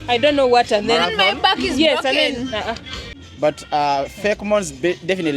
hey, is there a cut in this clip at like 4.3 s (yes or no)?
no